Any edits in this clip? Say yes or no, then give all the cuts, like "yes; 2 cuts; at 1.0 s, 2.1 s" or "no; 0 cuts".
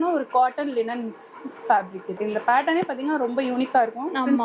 yes; 1 cut; at 2.2 s